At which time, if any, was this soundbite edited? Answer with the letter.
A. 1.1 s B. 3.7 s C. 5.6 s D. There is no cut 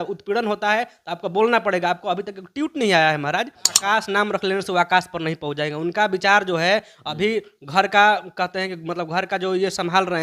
B